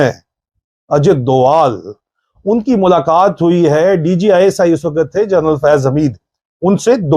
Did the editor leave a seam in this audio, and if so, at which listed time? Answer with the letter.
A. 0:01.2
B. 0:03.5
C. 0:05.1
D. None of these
D